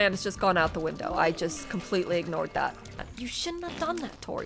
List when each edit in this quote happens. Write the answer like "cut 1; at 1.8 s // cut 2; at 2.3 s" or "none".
cut 1; at 3.0 s